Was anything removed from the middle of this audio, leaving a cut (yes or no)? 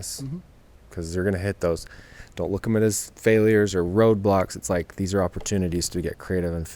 no